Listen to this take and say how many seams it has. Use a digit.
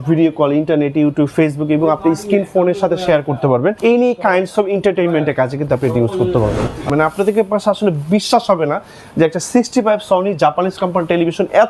2